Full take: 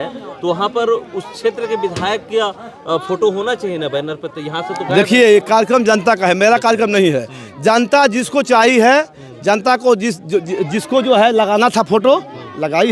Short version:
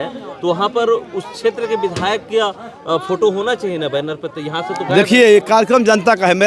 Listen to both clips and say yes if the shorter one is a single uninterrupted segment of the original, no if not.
yes